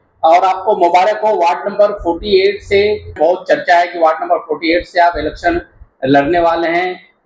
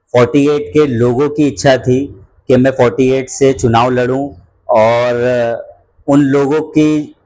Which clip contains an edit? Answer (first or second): first